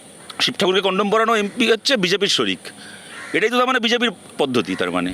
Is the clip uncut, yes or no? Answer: yes